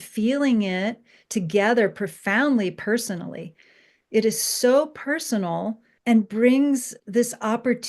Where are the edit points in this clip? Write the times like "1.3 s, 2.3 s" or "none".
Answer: 5.9 s, 7.0 s